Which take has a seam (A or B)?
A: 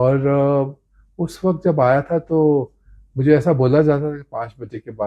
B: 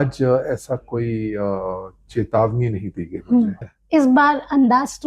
B